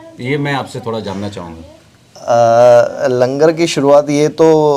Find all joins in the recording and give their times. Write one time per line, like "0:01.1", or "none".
none